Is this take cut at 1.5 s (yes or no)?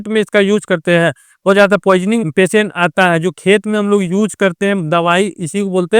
yes